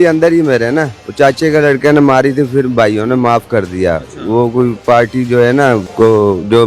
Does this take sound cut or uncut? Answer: cut